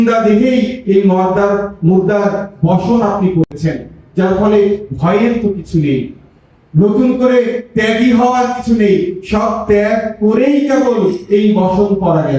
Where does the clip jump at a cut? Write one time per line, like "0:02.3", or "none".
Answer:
none